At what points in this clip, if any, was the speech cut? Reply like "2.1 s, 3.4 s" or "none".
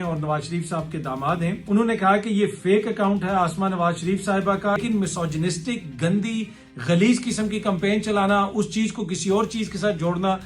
1.6 s, 4.8 s